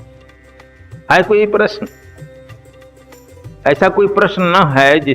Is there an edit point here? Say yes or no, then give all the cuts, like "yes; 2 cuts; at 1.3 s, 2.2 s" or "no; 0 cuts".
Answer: yes; 3 cuts; at 0.8 s, 2.0 s, 3.6 s